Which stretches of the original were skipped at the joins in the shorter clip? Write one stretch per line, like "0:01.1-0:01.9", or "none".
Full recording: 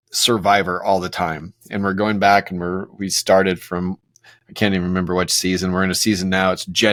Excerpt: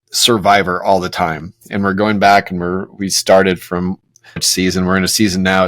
0:04.5-0:05.3